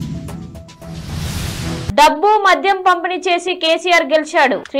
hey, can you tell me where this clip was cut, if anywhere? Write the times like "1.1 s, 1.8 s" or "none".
1.9 s